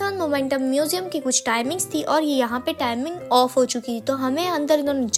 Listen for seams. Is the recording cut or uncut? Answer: uncut